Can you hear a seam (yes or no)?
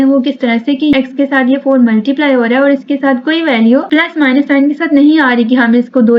yes